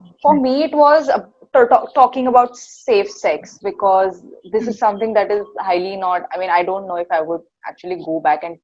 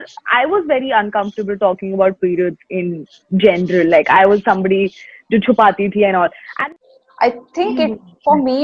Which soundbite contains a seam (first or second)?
second